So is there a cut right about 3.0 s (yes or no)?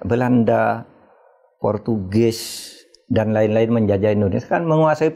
no